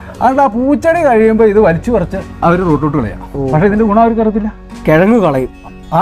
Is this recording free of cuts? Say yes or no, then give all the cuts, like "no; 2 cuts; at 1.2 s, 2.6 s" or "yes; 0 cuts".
yes; 0 cuts